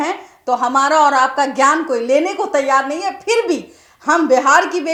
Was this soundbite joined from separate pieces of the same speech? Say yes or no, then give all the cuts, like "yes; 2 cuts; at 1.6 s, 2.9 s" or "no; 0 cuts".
no; 0 cuts